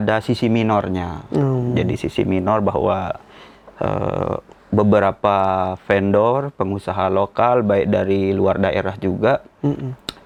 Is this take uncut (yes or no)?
yes